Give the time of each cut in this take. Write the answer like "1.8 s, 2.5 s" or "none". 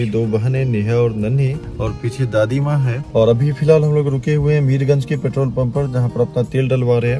none